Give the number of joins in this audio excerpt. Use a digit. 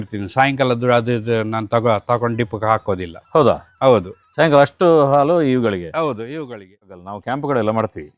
1